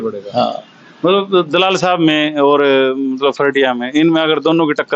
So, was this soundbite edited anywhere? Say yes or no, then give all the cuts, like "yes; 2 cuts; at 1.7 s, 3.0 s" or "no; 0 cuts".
no; 0 cuts